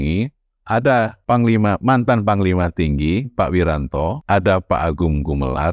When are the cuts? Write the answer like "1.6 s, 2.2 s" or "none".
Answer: 1.2 s, 4.2 s